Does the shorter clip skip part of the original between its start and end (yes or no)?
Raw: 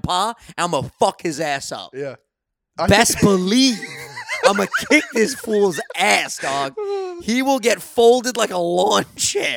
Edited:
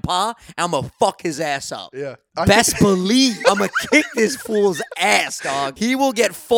yes